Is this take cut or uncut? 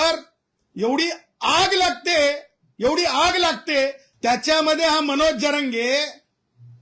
cut